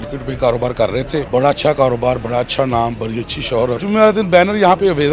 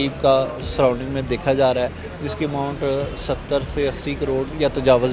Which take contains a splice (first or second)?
first